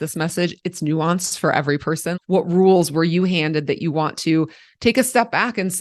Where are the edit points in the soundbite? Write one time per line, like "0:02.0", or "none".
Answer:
0:02.1